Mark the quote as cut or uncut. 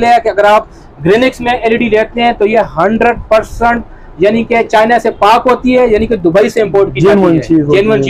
uncut